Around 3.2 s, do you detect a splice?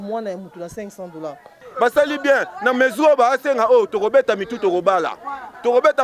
no; 1 cut; at 1.6 s

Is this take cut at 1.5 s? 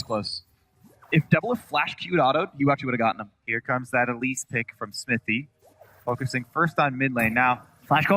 yes; 1 cut; at 1.5 s

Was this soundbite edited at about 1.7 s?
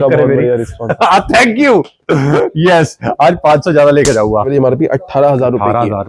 no; 1 cut; at 4.5 s

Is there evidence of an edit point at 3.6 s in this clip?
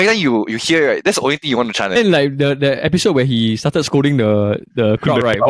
no; 1 cut; at 2.0 s

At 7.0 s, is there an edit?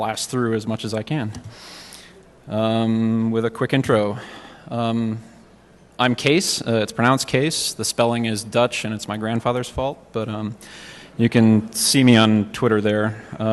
yes; 1 cut; at 7.0 s

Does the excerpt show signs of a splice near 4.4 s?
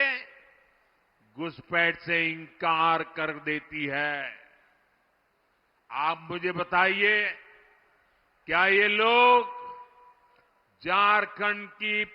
no; 0 cuts

